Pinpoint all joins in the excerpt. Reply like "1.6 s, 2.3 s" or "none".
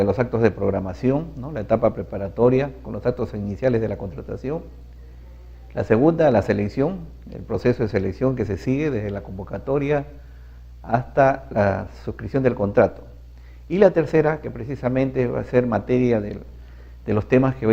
16.4 s